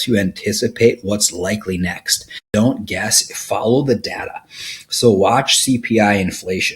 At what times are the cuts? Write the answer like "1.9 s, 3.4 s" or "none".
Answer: 2.4 s